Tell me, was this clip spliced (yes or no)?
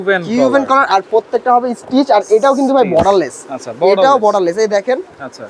no